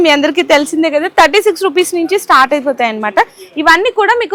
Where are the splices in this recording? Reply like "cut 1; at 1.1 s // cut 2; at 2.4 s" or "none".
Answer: none